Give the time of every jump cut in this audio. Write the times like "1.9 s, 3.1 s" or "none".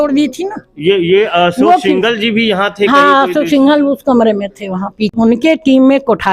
5.1 s